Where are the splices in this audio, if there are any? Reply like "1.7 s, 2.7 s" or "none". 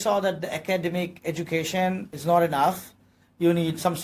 2.1 s